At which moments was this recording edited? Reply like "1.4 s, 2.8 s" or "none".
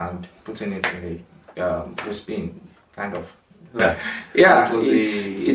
3.8 s